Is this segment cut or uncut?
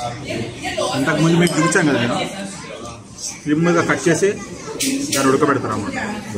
uncut